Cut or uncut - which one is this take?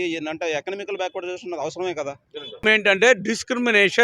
cut